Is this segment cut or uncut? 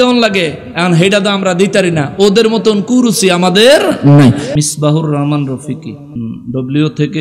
cut